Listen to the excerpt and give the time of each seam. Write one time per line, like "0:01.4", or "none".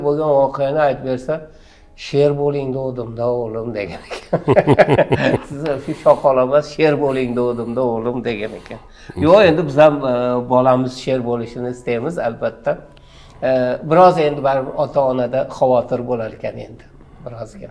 none